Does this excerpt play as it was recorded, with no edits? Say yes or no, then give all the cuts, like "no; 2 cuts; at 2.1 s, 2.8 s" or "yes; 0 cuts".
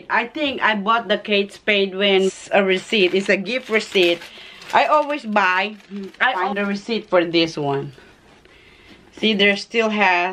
no; 2 cuts; at 2.3 s, 6.5 s